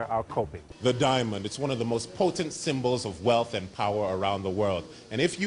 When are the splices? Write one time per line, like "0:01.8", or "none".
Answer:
0:01.1